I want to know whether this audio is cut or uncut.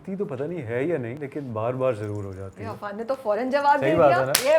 cut